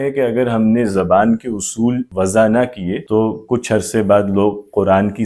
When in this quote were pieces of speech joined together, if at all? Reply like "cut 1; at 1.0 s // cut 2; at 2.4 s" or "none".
none